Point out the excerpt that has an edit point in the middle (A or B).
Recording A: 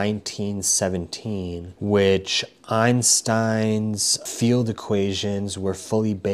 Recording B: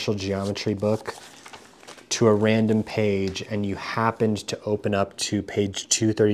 A